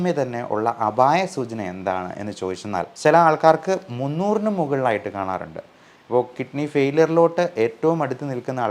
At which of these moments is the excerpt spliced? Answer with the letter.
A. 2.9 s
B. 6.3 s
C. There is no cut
A